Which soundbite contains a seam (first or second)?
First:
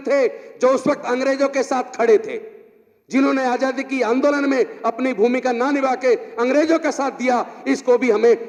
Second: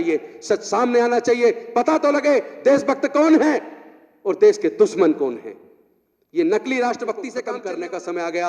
second